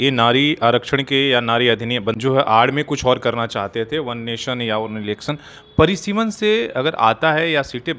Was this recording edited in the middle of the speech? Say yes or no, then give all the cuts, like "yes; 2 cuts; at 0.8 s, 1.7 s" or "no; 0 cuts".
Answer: no; 0 cuts